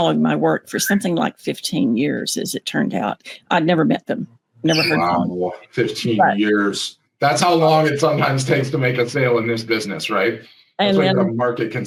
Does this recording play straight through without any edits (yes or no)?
yes